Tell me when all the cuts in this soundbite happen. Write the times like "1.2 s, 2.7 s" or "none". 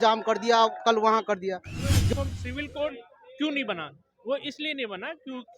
2.1 s